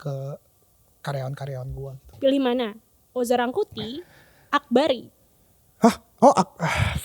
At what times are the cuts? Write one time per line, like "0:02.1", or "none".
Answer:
0:02.1

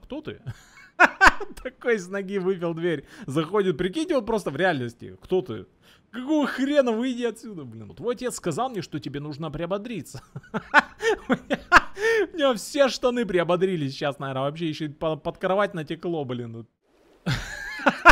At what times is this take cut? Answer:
0:07.9
0:16.7

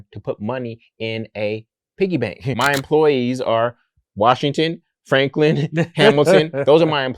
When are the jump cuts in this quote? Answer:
0:02.6

